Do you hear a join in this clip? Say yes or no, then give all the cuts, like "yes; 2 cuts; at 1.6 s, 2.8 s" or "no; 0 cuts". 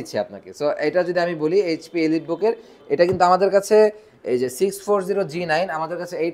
no; 0 cuts